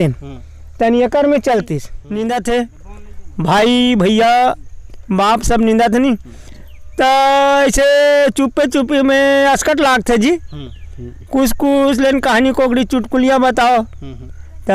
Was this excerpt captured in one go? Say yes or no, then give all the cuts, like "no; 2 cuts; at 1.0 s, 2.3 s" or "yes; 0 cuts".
no; 1 cut; at 2.0 s